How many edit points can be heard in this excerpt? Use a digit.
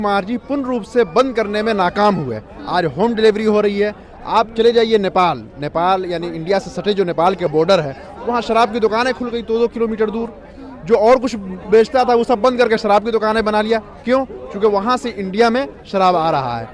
0